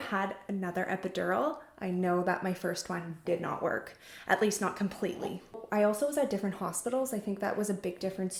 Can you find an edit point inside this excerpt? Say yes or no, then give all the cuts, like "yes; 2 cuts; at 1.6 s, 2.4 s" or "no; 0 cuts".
no; 0 cuts